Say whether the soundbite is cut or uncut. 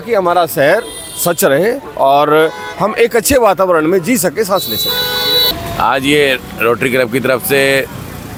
uncut